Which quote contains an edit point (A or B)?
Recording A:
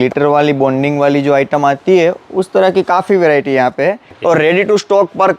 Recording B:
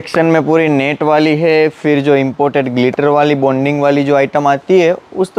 A